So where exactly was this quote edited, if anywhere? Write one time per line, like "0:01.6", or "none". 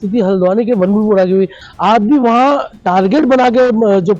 0:01.6